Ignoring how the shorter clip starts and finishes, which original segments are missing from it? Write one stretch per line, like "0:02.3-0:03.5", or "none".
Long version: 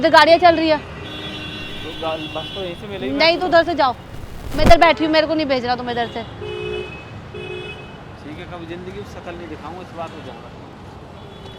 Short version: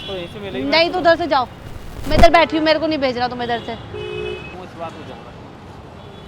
0:07.0-0:09.7